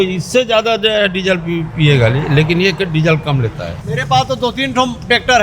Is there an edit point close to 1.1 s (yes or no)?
no